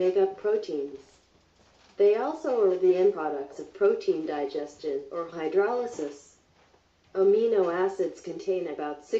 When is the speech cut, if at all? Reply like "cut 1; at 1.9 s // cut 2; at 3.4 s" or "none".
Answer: cut 1; at 6.5 s